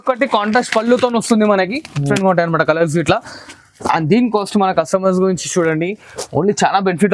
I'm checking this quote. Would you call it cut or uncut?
cut